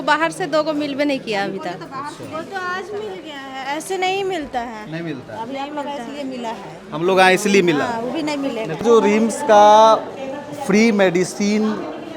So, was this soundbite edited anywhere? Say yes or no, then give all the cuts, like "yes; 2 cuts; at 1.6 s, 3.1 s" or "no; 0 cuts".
no; 0 cuts